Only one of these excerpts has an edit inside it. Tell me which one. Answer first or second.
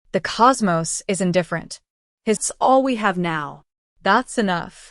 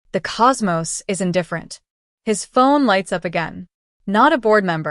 first